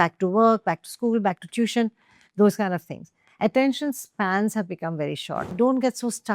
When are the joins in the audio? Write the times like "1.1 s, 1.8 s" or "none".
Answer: 5.4 s